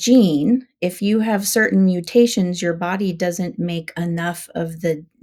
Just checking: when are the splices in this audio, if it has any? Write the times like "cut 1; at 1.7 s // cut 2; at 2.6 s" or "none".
none